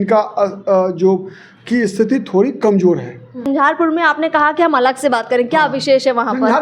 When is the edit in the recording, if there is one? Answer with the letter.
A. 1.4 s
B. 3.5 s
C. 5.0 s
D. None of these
B